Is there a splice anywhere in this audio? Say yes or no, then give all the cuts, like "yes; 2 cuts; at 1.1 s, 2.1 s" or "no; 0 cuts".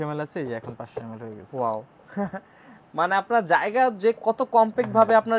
no; 0 cuts